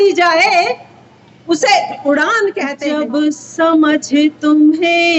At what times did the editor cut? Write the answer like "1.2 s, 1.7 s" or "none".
2.7 s